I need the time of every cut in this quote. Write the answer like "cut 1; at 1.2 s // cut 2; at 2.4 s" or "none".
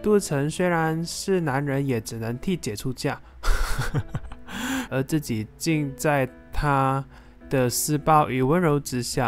cut 1; at 4.9 s